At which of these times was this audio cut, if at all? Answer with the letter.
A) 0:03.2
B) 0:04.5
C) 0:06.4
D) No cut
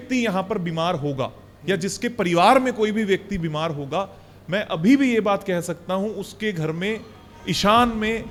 D